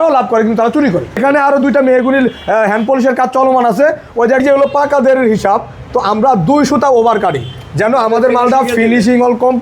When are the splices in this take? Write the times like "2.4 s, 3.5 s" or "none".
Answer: 1.2 s, 4.4 s